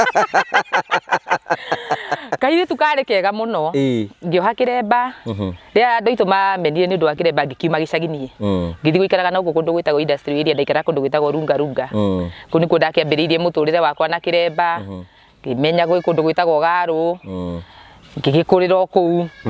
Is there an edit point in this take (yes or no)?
no